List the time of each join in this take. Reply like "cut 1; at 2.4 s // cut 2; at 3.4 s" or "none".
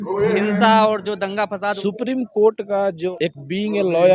cut 1; at 1.8 s // cut 2; at 3.1 s